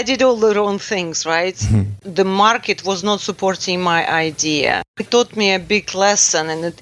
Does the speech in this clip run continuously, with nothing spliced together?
no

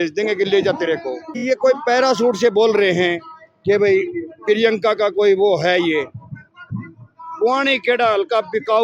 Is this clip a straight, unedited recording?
no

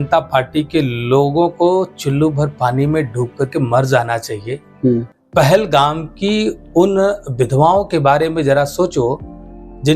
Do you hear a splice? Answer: no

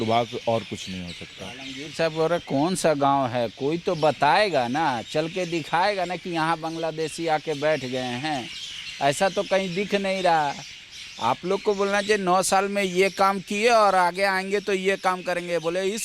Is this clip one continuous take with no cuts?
yes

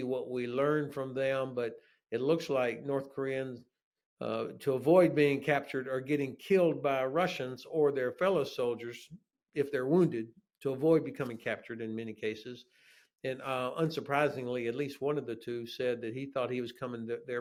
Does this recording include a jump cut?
no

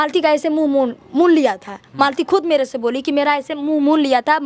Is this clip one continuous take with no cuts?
yes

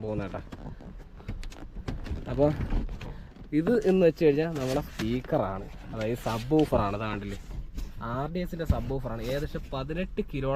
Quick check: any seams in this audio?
no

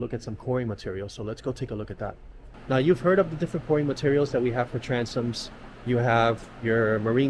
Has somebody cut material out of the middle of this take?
no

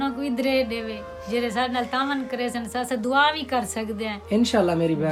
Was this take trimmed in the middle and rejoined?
no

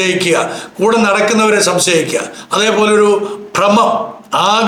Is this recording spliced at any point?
no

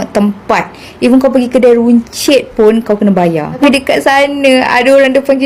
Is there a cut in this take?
yes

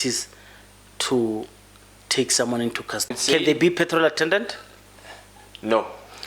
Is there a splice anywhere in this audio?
yes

